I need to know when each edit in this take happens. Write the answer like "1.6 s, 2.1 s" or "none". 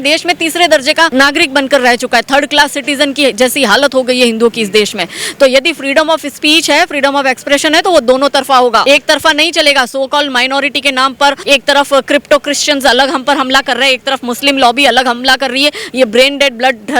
1.1 s, 8.8 s, 11.4 s